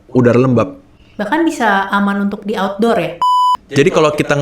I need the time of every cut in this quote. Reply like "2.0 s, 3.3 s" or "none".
3.2 s